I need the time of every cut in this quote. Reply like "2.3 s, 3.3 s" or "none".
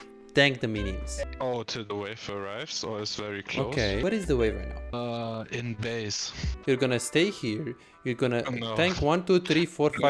1.2 s, 4.0 s, 4.9 s, 6.5 s